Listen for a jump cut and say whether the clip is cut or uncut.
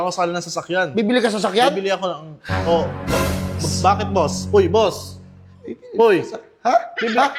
uncut